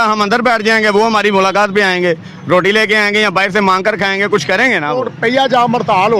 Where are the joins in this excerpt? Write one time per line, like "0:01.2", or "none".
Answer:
0:05.1